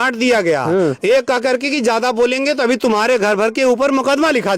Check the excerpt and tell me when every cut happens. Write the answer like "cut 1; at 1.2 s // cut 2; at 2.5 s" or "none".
none